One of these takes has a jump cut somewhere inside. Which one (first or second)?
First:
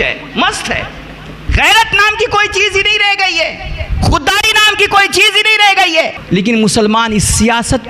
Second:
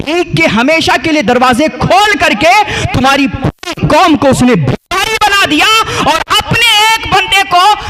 first